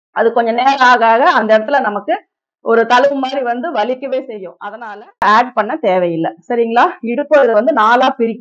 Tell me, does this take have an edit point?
yes; 1 cut; at 5.2 s

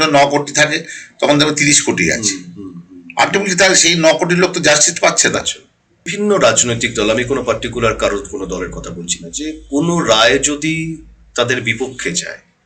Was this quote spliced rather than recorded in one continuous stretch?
yes; 1 cut; at 6.1 s

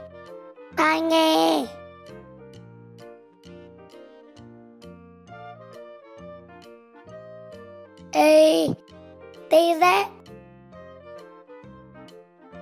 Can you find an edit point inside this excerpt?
yes; 3 cuts; at 1.7 s, 7.4 s, 10.2 s

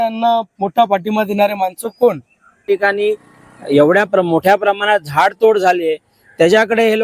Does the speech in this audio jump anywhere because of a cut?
yes; 1 cut; at 2.6 s

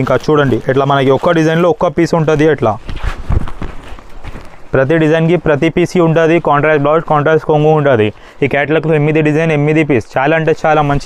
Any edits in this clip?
no; 0 cuts

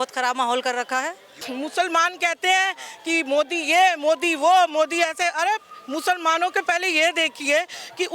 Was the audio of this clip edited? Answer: yes; 1 cut; at 1.3 s

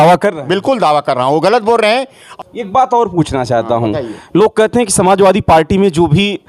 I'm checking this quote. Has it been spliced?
yes; 1 cut; at 2.2 s

